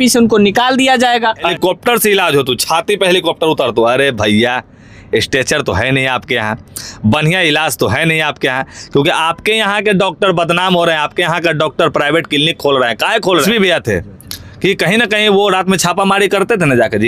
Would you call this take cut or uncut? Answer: cut